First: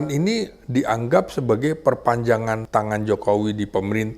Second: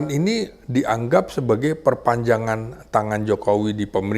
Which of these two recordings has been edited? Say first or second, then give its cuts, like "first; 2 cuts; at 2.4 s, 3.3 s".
first; 1 cut; at 2.6 s